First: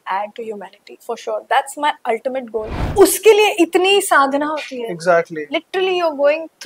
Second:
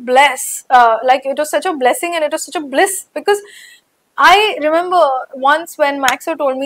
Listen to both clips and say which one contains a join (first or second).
first